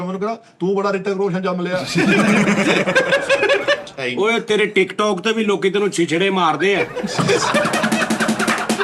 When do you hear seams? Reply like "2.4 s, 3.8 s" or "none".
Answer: 3.8 s